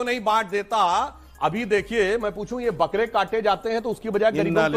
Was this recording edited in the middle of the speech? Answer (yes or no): no